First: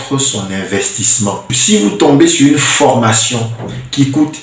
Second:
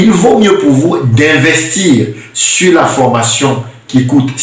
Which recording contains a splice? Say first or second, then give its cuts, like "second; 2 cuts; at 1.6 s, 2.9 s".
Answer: first; 1 cut; at 1.6 s